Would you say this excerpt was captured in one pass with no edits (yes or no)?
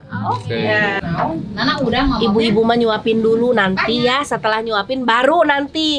no